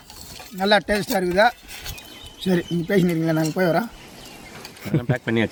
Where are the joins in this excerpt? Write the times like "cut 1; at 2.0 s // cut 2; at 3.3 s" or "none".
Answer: none